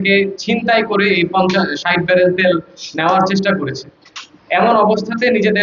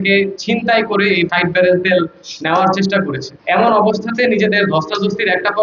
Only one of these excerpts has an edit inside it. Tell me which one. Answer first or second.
second